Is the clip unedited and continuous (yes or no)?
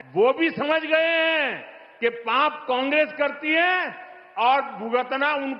yes